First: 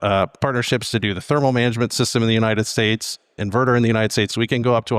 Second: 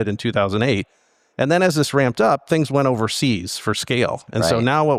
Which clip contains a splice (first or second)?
first